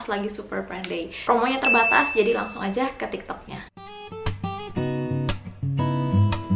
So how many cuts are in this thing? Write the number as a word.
one